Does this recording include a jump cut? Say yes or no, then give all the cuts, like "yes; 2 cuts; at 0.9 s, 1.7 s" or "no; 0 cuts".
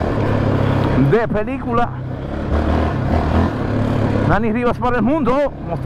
no; 0 cuts